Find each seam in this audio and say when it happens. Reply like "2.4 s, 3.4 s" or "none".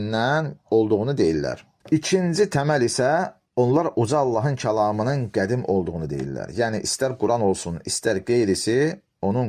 1.7 s